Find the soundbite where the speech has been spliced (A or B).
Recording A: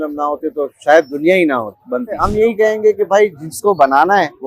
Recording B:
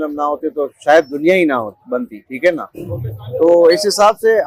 A